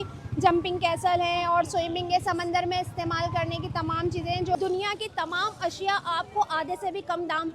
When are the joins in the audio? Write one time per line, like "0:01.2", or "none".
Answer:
0:04.5